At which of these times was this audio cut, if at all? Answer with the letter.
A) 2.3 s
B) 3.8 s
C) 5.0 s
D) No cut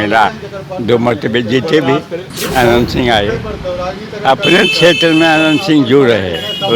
A